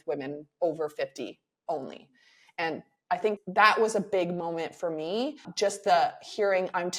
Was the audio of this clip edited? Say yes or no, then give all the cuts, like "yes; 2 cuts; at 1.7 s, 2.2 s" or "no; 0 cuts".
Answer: yes; 1 cut; at 5.5 s